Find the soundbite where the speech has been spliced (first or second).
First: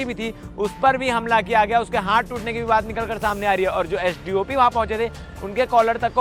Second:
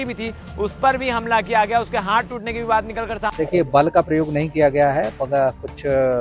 second